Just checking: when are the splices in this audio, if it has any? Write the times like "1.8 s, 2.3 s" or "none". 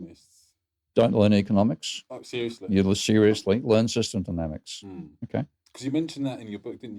none

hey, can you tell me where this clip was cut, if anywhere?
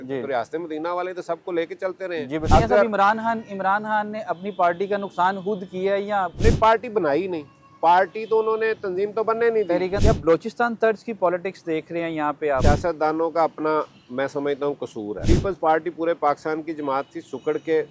2.4 s, 10.0 s, 12.6 s, 15.2 s

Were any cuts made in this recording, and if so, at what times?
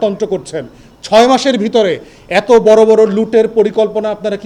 none

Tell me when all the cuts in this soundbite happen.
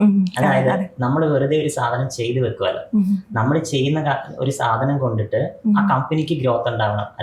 none

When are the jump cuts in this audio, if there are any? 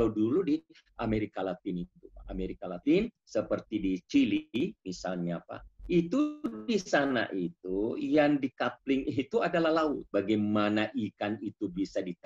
10.0 s

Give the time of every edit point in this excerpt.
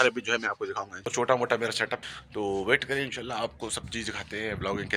0.9 s, 2.1 s

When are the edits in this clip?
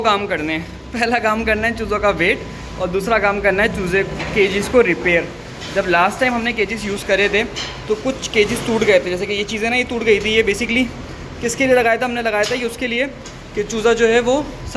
none

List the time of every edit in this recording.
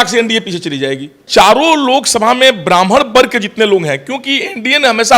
1.2 s

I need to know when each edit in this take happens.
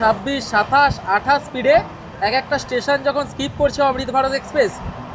none

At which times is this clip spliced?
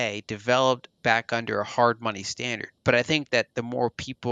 2.7 s

